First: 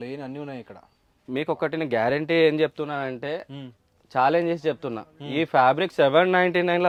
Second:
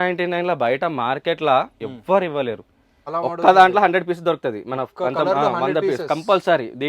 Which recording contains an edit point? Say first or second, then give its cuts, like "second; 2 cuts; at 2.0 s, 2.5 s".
second; 1 cut; at 3.0 s